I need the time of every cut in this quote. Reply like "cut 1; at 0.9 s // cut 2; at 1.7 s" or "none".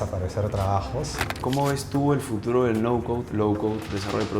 cut 1; at 1.4 s